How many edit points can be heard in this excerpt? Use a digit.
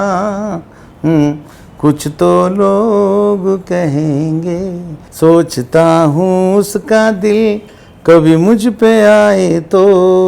1